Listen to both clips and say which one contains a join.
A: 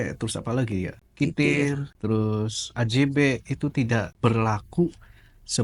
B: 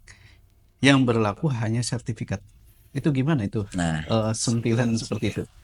A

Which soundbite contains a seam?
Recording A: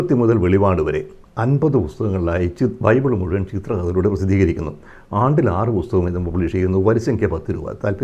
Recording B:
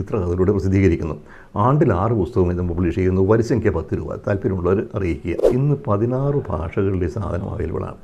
B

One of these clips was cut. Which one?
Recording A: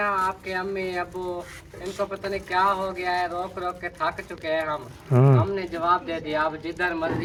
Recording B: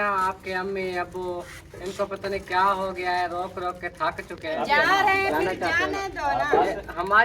B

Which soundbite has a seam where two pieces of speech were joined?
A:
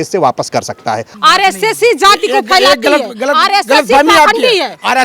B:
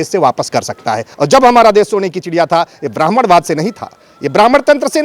A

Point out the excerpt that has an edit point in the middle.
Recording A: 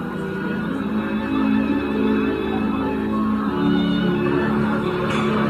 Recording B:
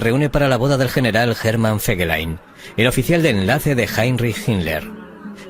B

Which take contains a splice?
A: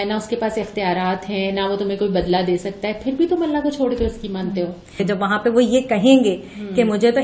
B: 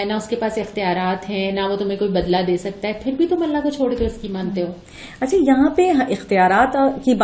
A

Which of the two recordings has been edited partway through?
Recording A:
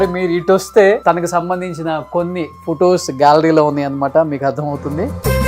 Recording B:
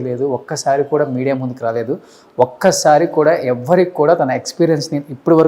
A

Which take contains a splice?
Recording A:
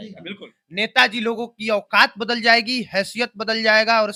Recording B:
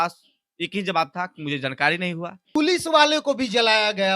B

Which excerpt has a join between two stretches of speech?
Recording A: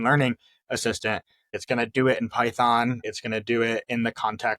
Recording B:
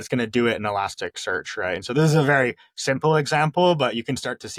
A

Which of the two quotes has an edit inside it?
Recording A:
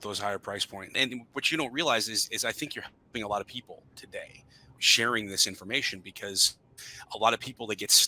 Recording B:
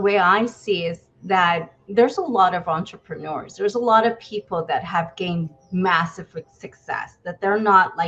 A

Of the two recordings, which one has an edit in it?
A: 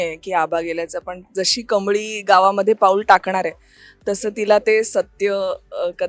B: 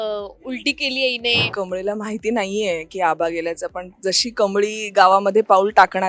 B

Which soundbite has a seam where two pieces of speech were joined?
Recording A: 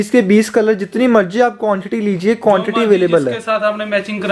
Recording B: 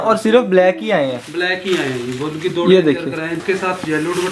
B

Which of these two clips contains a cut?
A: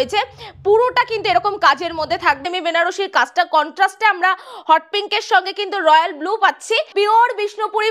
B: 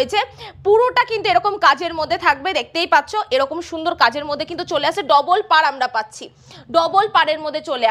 A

